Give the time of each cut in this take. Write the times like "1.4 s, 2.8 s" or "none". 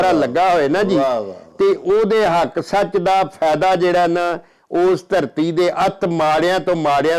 none